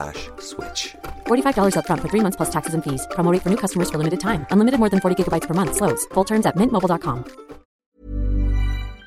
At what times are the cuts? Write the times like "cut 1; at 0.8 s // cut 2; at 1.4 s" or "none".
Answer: cut 1; at 8.0 s

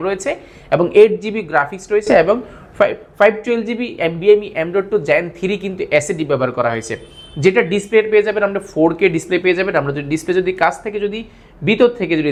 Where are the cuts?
none

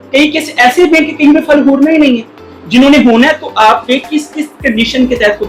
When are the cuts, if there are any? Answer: none

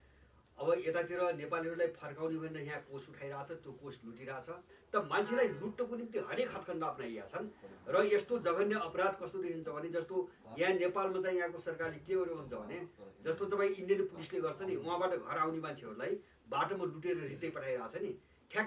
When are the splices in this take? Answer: cut 1; at 4.7 s

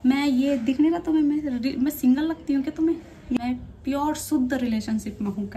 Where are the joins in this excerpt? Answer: cut 1; at 3.4 s

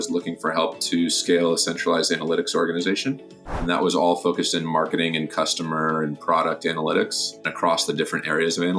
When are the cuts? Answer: cut 1; at 3.6 s // cut 2; at 7.5 s

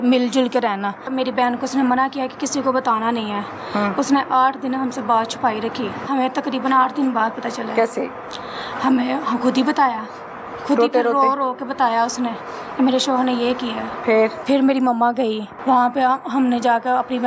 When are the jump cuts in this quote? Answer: cut 1; at 1.0 s // cut 2; at 6.0 s // cut 3; at 14.4 s // cut 4; at 15.5 s

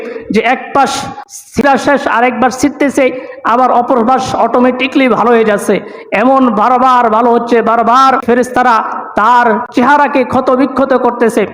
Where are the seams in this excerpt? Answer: cut 1; at 1.6 s // cut 2; at 8.2 s // cut 3; at 9.6 s

